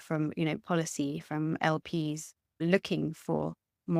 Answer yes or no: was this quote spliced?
yes